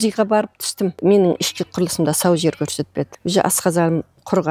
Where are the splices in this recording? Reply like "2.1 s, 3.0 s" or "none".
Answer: 1.0 s, 3.2 s